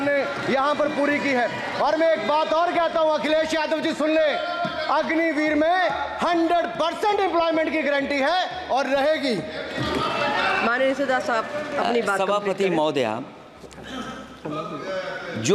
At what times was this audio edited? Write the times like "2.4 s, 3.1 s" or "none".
none